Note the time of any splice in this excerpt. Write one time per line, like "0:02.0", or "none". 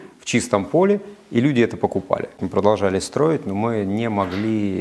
0:02.4

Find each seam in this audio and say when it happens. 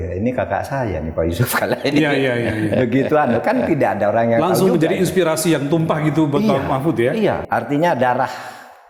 0:07.4

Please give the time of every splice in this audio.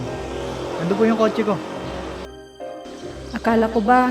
none

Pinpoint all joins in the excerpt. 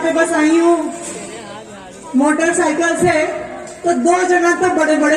none

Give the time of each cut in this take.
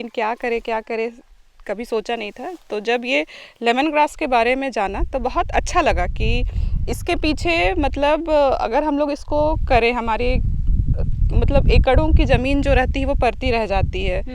none

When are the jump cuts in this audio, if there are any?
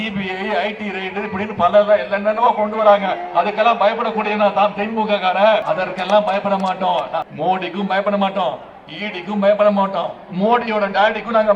0:05.6
0:07.3

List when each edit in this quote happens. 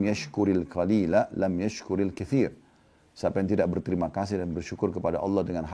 none

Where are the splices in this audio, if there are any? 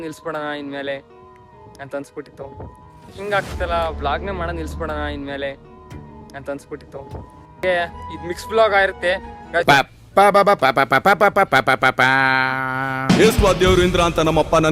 0:03.2
0:07.6

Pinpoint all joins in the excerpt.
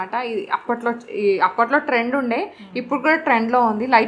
none

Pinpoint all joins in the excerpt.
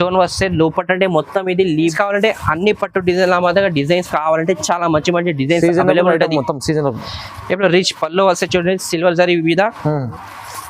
0:01.9

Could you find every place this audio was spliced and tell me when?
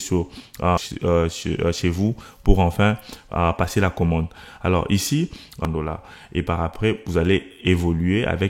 0:00.8
0:05.6

